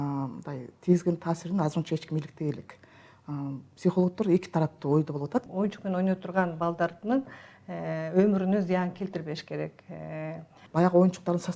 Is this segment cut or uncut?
cut